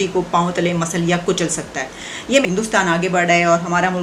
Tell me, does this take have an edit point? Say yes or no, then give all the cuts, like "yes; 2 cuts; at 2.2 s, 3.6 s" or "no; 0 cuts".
no; 0 cuts